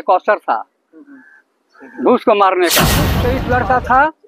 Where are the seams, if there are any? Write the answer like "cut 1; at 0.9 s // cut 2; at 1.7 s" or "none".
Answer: cut 1; at 3.3 s